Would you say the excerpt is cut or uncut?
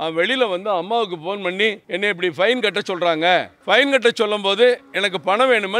cut